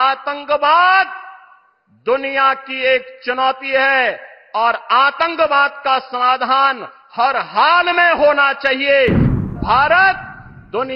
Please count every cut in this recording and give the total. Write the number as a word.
one